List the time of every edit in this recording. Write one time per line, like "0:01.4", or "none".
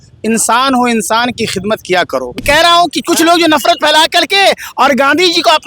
0:02.4